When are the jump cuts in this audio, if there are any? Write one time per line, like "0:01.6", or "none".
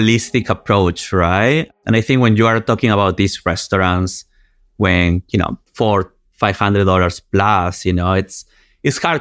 0:01.7
0:05.6